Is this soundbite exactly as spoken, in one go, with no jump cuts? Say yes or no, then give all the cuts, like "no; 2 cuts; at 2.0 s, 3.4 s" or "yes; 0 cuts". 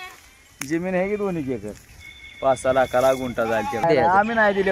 no; 2 cuts; at 1.8 s, 3.8 s